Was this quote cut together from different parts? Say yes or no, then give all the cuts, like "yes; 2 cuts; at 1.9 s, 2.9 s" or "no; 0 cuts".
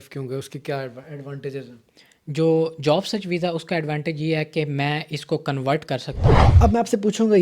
yes; 1 cut; at 6.4 s